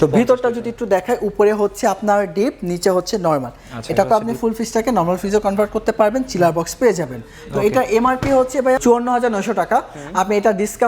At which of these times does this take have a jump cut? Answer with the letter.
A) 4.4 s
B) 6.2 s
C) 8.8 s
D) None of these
C